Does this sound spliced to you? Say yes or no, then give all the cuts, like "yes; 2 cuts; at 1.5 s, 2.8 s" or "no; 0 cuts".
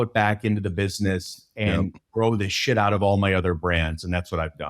no; 0 cuts